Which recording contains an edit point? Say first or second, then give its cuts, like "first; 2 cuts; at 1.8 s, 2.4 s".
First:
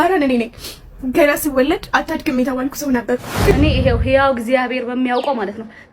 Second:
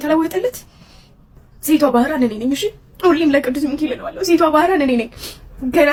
first; 1 cut; at 3.5 s